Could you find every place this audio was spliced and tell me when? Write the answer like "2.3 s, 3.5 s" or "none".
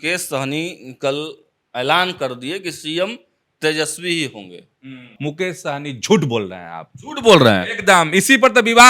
5.0 s